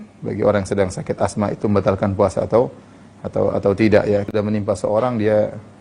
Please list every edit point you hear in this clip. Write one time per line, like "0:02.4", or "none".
0:04.2